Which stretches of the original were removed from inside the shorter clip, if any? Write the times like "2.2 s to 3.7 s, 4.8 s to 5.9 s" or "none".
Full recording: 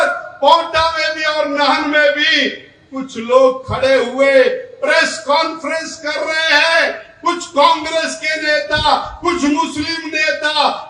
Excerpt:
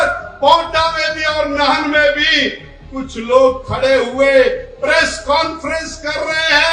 none